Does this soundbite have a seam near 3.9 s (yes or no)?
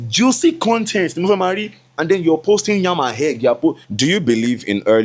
yes